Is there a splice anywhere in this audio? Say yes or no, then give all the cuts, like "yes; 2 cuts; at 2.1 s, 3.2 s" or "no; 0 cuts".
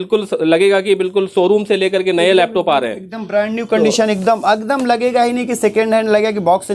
no; 0 cuts